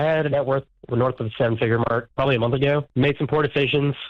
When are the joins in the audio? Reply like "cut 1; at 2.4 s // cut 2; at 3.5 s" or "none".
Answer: none